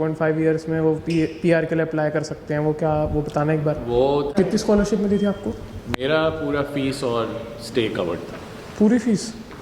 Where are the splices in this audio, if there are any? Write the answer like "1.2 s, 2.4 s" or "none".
4.3 s

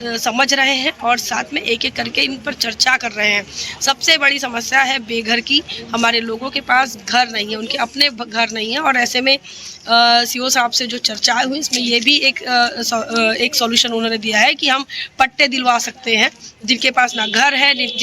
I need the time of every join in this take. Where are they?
none

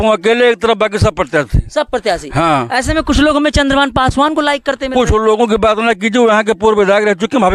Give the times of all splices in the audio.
none

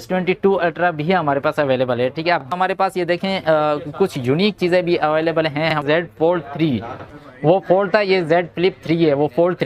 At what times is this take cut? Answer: 2.5 s, 5.8 s, 7.2 s

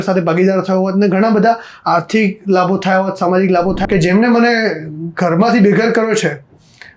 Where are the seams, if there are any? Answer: 3.8 s

